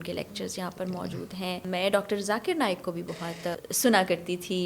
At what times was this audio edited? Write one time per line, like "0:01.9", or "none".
0:01.6
0:03.5